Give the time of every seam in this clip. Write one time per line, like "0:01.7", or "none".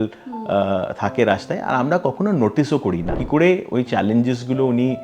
0:03.1